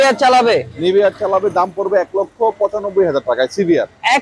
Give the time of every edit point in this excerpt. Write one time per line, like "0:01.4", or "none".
none